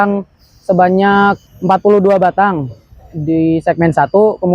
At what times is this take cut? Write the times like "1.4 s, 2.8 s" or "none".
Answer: 1.5 s